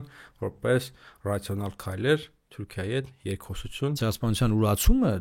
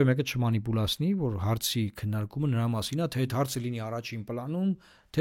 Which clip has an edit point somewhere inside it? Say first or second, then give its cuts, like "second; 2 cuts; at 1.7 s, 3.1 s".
first; 1 cut; at 4.0 s